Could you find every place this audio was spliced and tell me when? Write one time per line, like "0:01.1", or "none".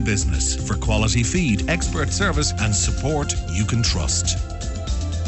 none